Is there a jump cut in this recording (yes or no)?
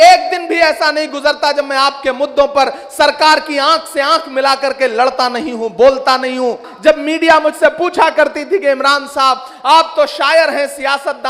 yes